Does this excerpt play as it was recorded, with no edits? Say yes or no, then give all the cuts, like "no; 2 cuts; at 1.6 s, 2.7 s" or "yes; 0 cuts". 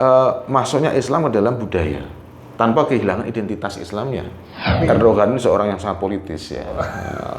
no; 1 cut; at 4.8 s